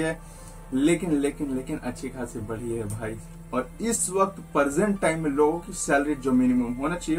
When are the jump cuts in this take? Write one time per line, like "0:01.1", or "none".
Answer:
0:03.3